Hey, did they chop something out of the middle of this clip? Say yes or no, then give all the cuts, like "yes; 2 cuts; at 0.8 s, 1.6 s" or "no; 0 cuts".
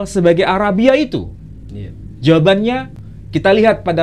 yes; 1 cut; at 3.0 s